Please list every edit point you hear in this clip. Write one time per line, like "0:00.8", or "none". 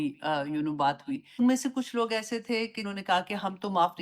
0:01.4
0:02.8